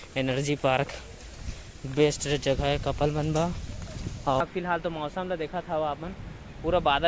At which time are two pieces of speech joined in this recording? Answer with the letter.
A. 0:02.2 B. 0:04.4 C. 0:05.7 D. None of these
B